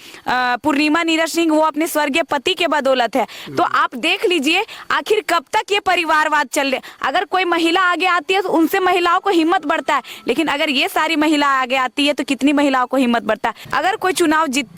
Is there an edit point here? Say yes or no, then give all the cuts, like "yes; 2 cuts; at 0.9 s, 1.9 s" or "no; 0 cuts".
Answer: yes; 1 cut; at 13.6 s